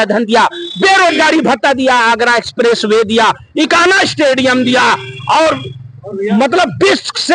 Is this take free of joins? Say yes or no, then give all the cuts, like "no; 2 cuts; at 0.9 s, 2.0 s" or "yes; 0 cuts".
yes; 0 cuts